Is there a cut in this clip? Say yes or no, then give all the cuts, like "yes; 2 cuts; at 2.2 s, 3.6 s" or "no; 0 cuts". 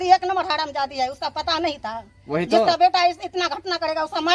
no; 0 cuts